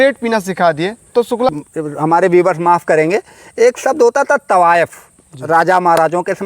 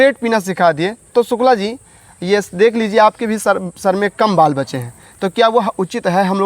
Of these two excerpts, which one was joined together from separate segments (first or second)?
first